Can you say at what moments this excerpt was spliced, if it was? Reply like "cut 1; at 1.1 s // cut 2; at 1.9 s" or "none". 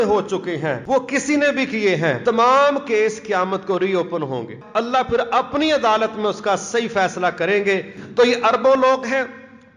cut 1; at 0.8 s // cut 2; at 2.2 s // cut 3; at 4.6 s // cut 4; at 8.0 s

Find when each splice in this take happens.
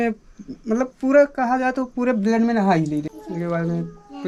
none

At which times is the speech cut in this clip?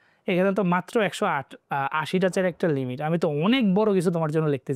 none

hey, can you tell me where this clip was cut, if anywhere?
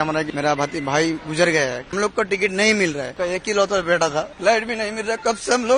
cut 1; at 3.1 s

